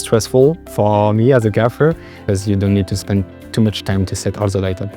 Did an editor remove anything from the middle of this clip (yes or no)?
yes